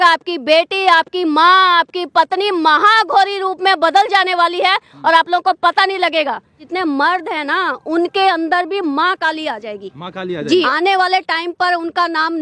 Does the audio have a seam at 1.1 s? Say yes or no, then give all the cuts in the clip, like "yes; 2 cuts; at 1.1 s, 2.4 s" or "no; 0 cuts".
no; 2 cuts; at 6.6 s, 10.7 s